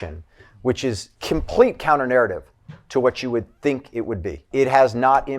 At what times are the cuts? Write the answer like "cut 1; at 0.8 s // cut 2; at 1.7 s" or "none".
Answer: cut 1; at 1.1 s // cut 2; at 4.5 s